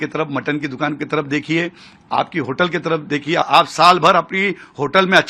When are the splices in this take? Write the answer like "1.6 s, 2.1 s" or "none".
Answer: 3.4 s